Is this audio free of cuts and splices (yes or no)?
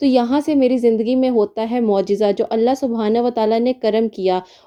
yes